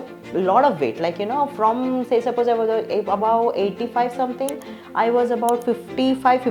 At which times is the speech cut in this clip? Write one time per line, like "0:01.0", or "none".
none